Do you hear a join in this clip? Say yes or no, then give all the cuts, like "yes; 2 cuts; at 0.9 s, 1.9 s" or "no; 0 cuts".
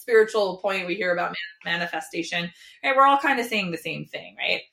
no; 0 cuts